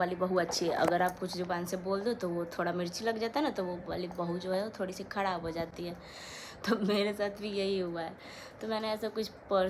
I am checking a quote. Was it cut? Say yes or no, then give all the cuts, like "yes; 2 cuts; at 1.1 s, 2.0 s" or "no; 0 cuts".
no; 0 cuts